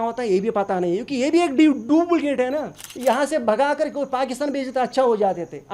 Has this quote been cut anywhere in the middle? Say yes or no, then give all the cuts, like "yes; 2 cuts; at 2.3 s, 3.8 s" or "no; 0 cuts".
yes; 1 cut; at 2.8 s